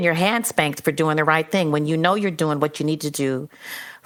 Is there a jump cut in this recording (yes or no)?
no